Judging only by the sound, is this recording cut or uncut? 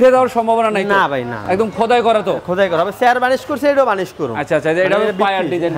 uncut